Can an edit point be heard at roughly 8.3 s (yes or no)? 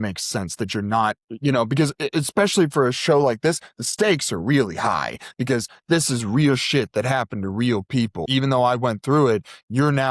yes